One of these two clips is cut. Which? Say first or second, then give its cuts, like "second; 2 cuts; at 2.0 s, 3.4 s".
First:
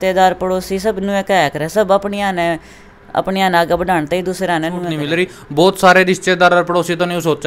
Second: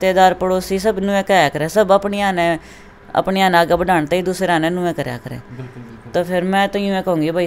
first; 1 cut; at 4.9 s